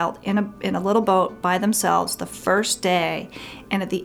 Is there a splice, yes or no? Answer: no